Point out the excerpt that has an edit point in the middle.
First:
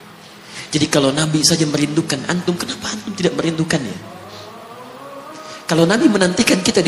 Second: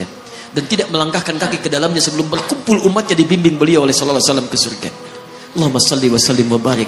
first; 2 cuts; at 4.0 s, 5.6 s

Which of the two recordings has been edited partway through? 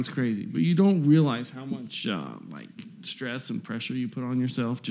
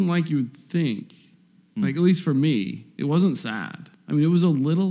second; 1 cut; at 3.9 s

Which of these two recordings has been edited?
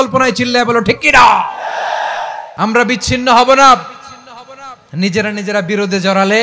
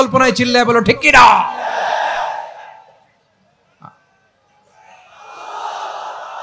first; 1 cut; at 2.4 s

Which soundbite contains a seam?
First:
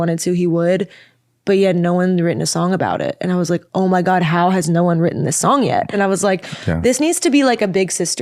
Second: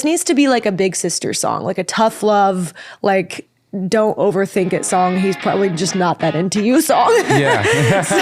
first; 1 cut; at 5.9 s

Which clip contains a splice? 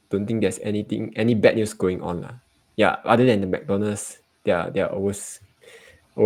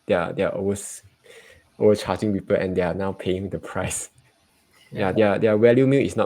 second; 1 cut; at 4.2 s

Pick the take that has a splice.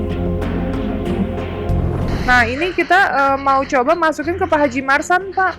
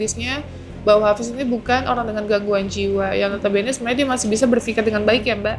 first; 1 cut; at 2.2 s

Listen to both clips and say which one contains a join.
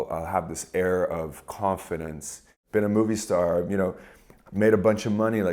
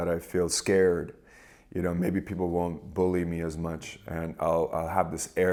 first; 1 cut; at 2.5 s

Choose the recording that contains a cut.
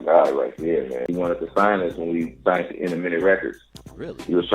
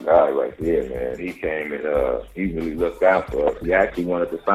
first; 1 cut; at 1.1 s

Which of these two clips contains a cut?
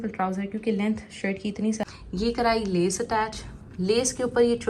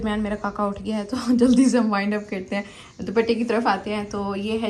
first; 1 cut; at 1.9 s

